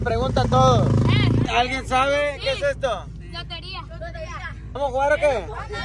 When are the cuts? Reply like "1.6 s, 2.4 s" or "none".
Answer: 1.5 s, 4.8 s